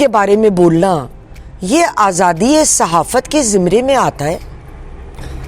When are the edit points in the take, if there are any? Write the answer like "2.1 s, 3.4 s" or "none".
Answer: none